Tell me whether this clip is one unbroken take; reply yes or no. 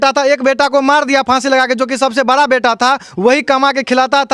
yes